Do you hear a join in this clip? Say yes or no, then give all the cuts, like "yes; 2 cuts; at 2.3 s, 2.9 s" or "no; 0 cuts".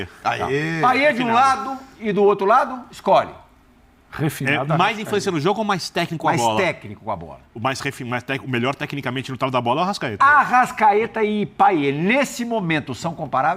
no; 0 cuts